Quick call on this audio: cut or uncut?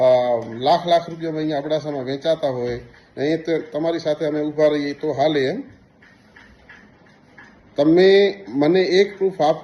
uncut